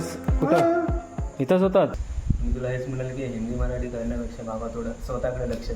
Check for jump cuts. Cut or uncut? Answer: cut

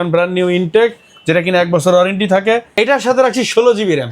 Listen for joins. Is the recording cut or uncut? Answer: cut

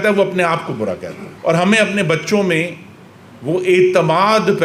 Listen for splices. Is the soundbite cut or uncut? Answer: uncut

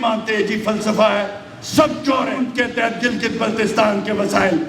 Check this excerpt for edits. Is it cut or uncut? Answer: cut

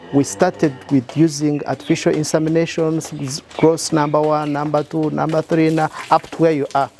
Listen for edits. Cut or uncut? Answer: uncut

